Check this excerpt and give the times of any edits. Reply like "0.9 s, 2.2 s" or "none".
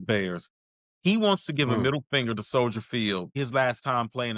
3.4 s